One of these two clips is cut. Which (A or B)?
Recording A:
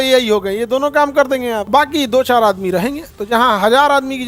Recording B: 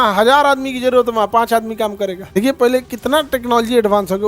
B